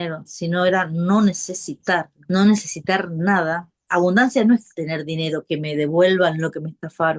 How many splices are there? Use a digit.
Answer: 2